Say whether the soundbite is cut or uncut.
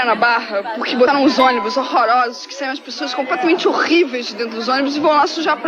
cut